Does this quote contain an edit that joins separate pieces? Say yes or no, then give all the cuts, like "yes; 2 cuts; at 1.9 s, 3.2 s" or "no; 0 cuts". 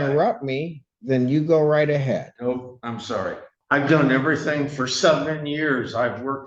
yes; 1 cut; at 3.5 s